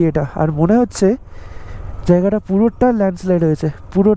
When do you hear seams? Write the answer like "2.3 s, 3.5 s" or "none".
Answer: none

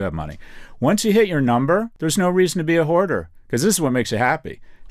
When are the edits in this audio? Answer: 2.0 s

